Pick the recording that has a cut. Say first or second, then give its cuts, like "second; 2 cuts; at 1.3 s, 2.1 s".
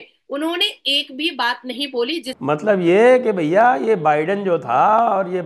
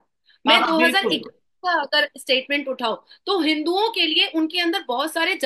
first; 1 cut; at 2.3 s